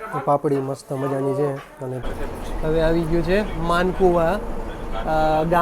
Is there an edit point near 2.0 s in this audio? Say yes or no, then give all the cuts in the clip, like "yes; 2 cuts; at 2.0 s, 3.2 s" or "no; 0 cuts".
yes; 1 cut; at 2.0 s